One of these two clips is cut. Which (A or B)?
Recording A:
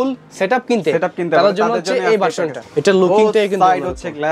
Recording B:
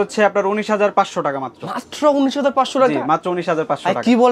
A